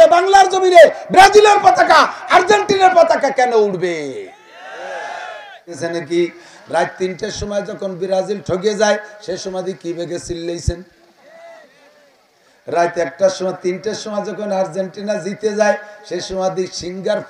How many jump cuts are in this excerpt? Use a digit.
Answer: 1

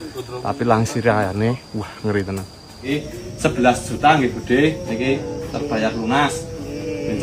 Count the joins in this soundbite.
1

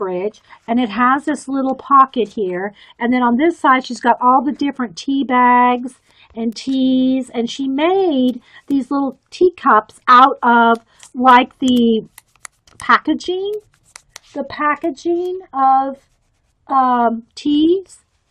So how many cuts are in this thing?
1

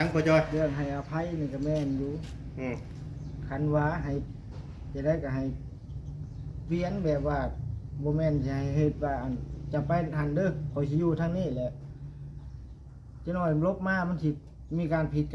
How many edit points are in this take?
0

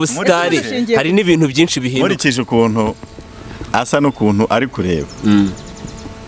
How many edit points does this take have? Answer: 0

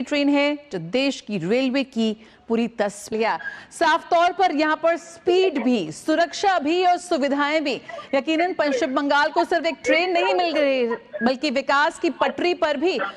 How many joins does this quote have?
1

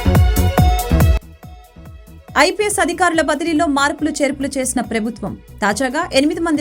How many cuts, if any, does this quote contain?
0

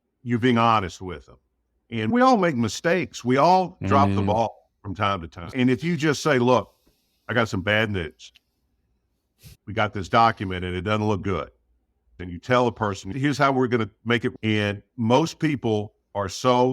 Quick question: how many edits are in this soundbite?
5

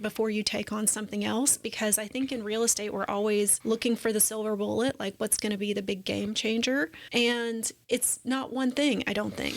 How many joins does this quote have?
2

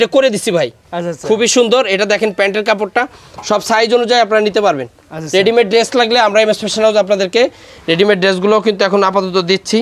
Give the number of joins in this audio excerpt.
0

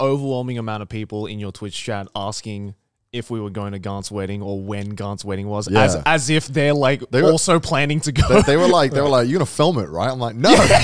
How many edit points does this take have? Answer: 0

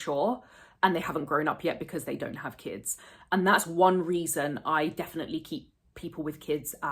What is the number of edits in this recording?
0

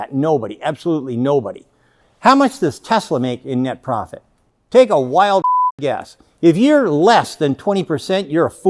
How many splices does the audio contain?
2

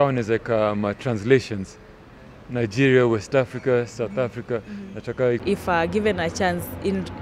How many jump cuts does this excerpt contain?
1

